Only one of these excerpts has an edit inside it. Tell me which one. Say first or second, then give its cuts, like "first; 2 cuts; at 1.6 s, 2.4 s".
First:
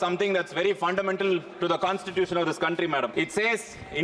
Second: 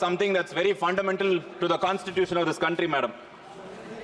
first; 1 cut; at 3.1 s